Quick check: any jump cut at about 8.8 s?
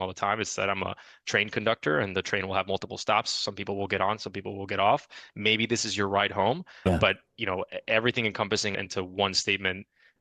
yes; 1 cut; at 8.8 s

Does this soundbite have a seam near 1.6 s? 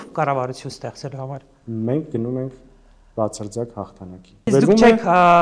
no; 1 cut; at 4.5 s

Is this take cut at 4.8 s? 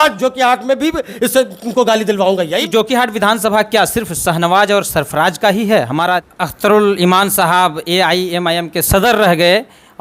no; 2 cuts; at 2.5 s, 6.3 s

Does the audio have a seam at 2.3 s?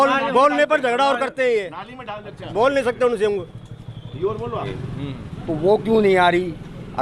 no; 1 cut; at 4.7 s

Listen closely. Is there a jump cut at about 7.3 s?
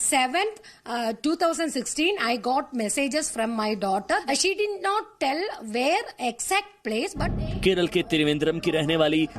yes; 2 cuts; at 4.2 s, 7.3 s

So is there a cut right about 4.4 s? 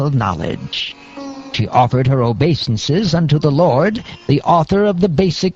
no; 1 cut; at 2.8 s

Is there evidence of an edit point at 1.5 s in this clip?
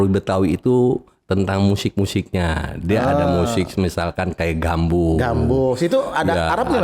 no; 0 cuts

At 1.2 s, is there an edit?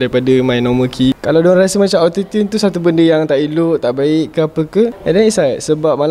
yes; 1 cut; at 1.2 s

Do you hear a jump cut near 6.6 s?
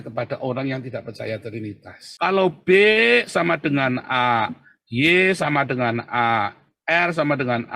no; 1 cut; at 2.0 s

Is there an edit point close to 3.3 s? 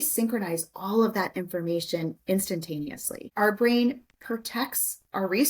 yes; 1 cut; at 3.3 s

